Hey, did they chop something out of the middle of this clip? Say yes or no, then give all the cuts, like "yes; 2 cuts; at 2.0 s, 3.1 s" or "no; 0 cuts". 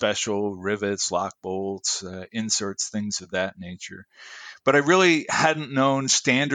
no; 0 cuts